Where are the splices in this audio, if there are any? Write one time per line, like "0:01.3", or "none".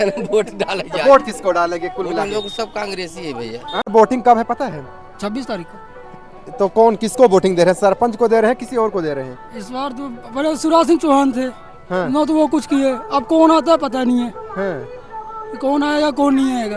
0:03.9